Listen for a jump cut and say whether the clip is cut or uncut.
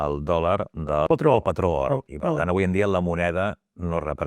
cut